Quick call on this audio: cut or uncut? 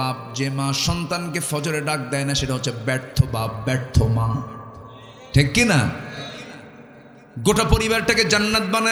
uncut